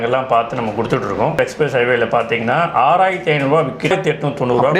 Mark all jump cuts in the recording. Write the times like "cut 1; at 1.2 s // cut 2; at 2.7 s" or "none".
cut 1; at 1.3 s // cut 2; at 3.9 s